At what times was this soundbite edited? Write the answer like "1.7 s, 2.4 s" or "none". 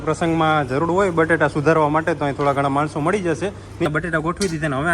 3.9 s